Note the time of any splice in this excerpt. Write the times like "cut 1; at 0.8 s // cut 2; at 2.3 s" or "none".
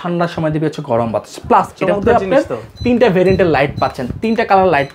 none